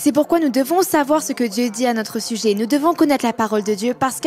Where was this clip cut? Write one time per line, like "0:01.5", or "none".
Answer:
none